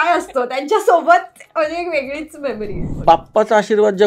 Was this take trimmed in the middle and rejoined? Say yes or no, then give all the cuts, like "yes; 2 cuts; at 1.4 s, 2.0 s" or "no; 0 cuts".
yes; 1 cut; at 2.9 s